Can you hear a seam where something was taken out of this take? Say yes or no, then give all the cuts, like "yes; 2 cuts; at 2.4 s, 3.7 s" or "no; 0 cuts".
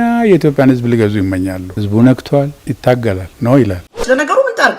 yes; 3 cuts; at 1.7 s, 2.6 s, 3.9 s